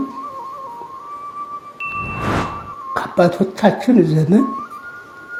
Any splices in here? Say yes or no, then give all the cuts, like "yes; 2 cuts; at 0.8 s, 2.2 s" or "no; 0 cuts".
no; 0 cuts